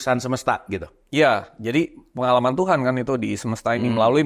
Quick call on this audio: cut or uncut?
uncut